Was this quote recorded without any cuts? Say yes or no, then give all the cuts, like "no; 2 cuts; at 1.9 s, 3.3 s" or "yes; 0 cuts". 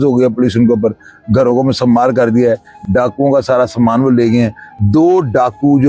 yes; 0 cuts